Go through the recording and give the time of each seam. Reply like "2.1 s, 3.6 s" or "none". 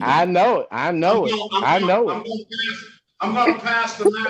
none